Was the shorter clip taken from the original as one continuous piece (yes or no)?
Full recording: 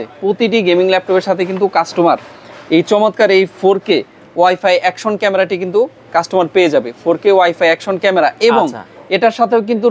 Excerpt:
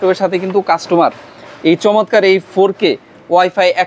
yes